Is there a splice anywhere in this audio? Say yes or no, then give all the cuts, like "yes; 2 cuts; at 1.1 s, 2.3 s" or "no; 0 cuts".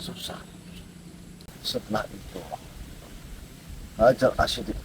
yes; 1 cut; at 1.4 s